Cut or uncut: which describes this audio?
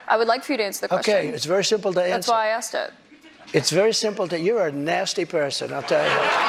uncut